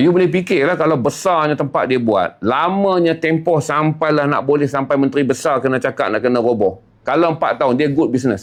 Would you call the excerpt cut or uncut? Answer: uncut